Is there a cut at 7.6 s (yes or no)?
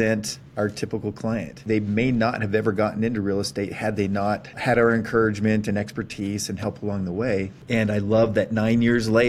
yes